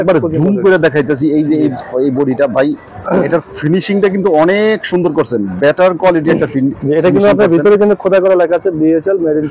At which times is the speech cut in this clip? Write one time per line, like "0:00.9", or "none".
none